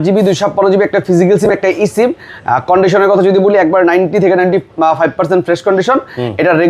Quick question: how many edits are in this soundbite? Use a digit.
0